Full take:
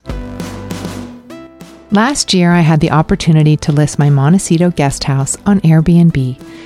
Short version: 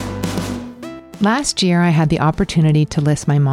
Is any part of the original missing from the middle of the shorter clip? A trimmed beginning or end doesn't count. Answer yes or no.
yes